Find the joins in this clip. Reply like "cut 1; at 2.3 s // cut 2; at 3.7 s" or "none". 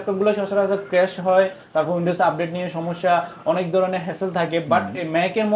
none

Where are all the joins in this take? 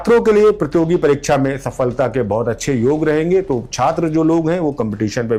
none

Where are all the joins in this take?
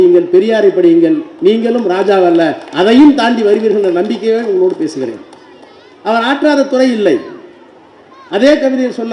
none

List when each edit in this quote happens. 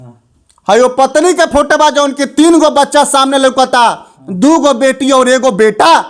none

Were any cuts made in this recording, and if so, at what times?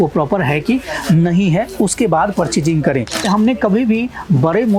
cut 1; at 3.2 s

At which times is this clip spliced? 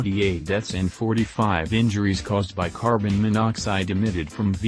none

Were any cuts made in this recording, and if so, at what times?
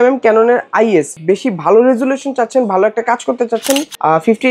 cut 1; at 1.1 s

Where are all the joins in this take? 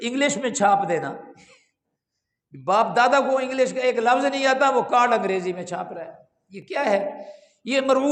none

